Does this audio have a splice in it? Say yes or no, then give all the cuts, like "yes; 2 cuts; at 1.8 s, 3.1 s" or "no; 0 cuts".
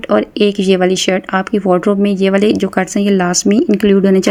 no; 0 cuts